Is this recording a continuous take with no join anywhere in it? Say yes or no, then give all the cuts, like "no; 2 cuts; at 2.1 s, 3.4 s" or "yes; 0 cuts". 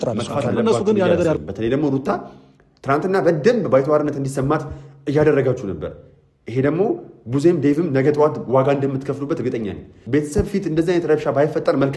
no; 2 cuts; at 1.4 s, 10.0 s